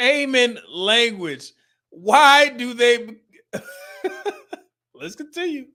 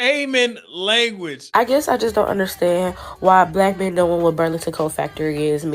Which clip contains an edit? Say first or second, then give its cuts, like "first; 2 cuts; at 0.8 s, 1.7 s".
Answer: second; 1 cut; at 1.3 s